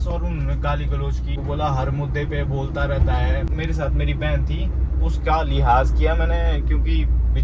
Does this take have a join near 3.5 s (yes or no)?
yes